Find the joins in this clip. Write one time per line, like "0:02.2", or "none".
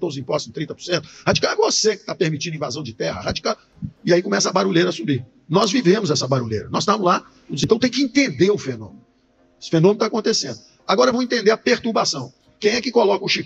0:07.4